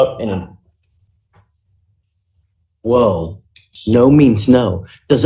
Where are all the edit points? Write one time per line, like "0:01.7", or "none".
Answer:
0:03.7

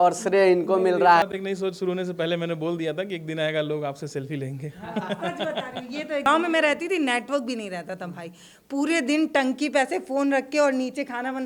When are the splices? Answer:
0:01.2
0:06.3

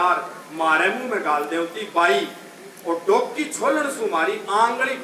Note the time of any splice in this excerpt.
none

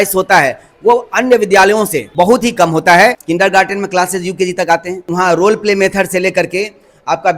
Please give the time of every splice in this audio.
0:02.0
0:03.2
0:05.1

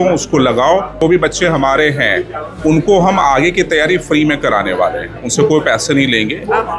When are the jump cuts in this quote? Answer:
0:01.0

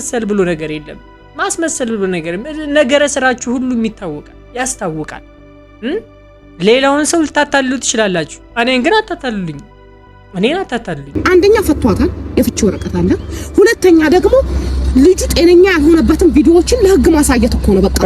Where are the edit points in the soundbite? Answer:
0:11.0

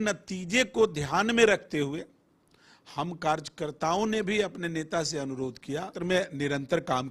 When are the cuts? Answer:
0:06.0

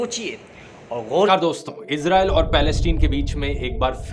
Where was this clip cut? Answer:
0:01.3

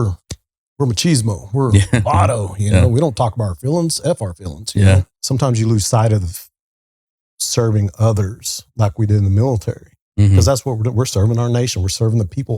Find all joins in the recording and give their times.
0:05.1

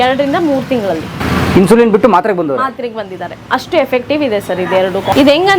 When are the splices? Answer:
none

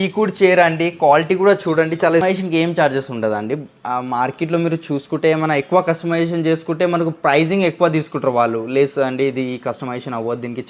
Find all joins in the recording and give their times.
0:02.2

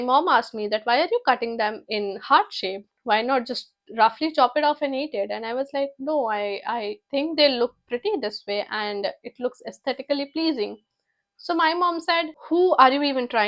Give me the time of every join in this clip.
0:12.4

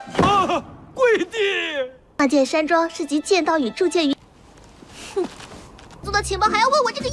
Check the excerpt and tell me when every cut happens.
0:02.0

